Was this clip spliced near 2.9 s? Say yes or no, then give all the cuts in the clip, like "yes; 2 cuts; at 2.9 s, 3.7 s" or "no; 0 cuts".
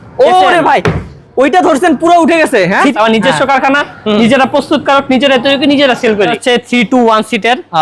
yes; 2 cuts; at 2.9 s, 6.4 s